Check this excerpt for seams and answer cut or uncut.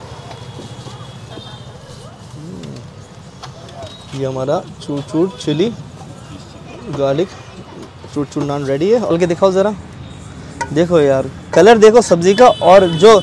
cut